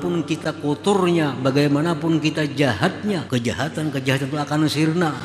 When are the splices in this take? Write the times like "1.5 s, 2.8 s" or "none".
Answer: 3.2 s